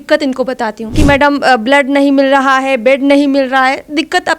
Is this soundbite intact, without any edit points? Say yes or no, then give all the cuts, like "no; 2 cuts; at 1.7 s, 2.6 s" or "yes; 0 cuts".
no; 1 cut; at 1.0 s